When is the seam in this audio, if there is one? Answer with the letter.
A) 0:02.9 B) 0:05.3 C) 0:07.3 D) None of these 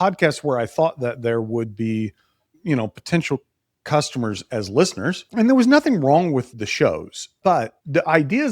C